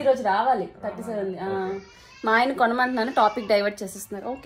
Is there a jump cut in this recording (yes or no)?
no